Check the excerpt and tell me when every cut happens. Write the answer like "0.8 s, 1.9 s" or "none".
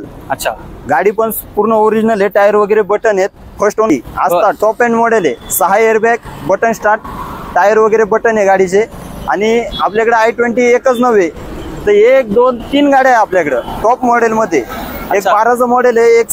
3.9 s